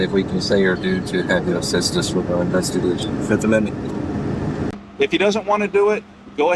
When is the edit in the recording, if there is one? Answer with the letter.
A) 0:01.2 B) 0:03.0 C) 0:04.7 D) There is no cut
C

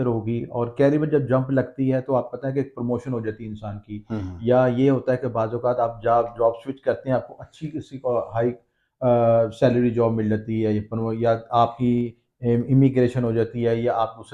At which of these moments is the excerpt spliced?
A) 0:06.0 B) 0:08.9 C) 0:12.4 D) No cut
D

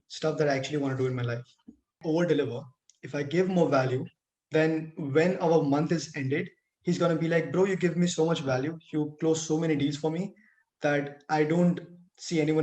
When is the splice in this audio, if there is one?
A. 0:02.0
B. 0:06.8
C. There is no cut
A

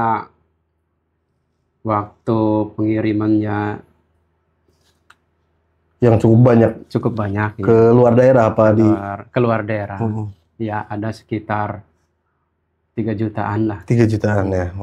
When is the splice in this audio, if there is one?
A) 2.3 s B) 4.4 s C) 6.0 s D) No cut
D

